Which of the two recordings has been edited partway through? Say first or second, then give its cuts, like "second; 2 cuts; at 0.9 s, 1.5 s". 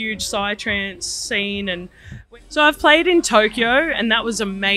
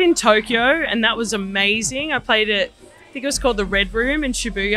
first; 1 cut; at 2.2 s